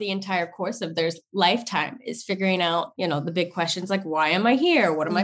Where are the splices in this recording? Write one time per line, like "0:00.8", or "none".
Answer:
0:02.9

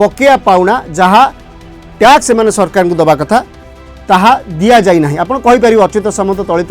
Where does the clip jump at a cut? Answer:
none

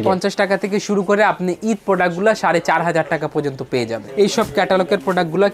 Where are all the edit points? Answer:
0:04.0

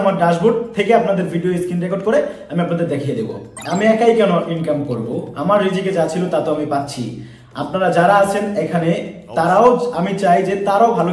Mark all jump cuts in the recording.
0:03.5

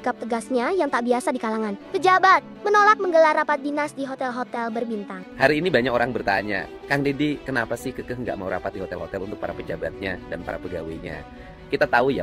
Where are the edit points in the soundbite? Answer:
0:05.3

